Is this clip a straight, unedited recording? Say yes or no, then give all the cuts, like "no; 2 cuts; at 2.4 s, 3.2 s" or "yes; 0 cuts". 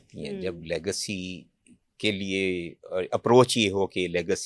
yes; 0 cuts